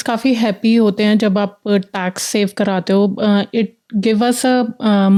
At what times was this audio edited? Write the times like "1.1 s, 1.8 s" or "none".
none